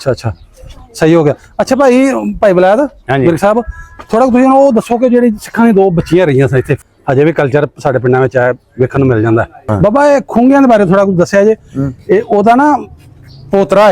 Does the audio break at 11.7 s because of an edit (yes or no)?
no